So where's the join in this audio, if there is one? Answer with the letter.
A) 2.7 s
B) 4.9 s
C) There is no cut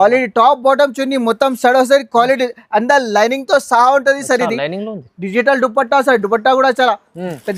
C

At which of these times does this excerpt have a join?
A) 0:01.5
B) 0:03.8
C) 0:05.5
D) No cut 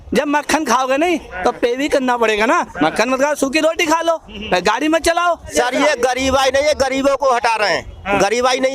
C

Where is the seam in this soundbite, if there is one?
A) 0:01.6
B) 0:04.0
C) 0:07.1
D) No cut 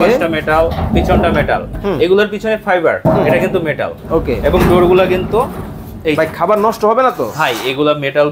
D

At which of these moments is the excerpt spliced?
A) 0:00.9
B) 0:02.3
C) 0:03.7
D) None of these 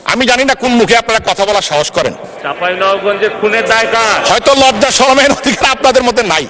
D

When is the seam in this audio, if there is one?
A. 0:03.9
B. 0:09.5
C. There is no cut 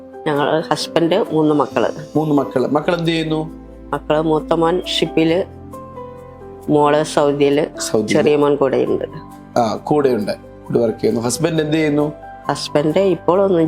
C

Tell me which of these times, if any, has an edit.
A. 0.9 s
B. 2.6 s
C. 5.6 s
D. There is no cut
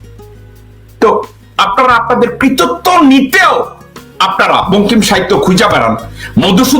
A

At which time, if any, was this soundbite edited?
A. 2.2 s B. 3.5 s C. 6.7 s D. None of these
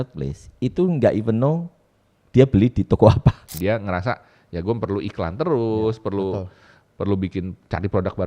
B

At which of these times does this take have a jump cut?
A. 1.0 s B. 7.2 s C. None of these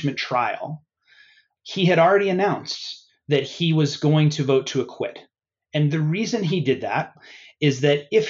B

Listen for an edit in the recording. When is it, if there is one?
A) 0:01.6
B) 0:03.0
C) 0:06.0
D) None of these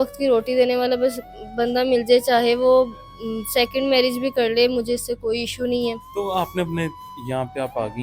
D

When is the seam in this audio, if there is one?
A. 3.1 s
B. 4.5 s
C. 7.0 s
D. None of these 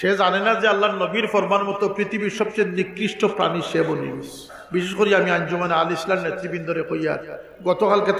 B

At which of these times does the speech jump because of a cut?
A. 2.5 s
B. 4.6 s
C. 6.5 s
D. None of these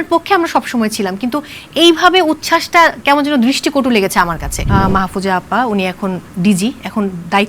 B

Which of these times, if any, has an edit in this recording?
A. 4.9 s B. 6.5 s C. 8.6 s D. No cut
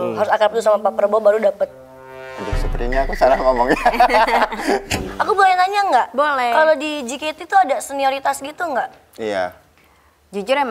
A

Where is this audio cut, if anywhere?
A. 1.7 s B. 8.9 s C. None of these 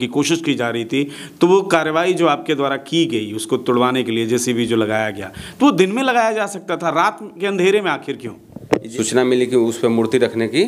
B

